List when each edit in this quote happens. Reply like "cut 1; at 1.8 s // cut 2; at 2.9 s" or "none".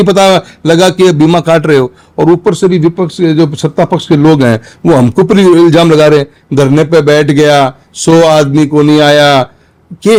none